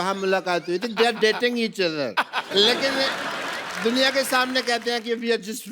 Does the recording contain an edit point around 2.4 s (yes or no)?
yes